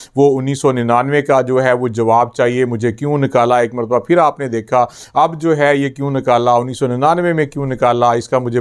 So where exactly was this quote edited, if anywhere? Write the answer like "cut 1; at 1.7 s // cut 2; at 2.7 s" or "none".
none